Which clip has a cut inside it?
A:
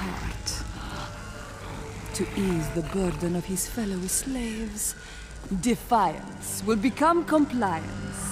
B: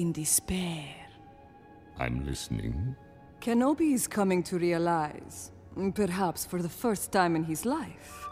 A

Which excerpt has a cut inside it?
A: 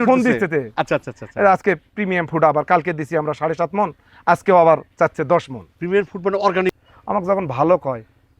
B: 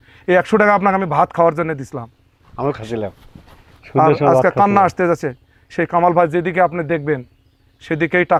A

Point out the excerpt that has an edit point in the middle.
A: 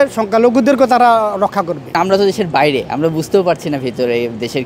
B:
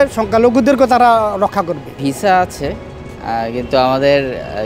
A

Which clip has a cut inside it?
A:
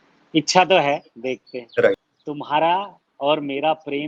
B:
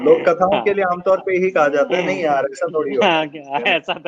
A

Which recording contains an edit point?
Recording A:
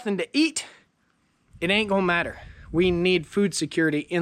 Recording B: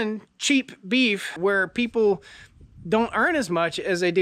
B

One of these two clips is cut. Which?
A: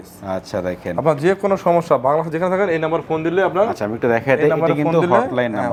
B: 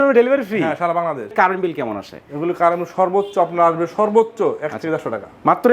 B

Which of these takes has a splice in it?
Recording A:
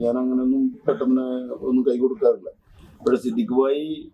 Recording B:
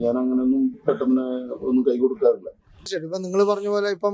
B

